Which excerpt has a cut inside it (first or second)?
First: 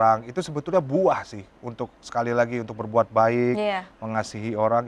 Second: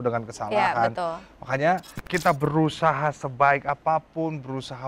second